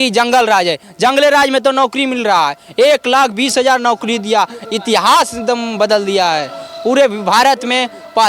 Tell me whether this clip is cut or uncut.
uncut